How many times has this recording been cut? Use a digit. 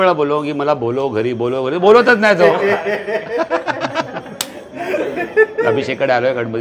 0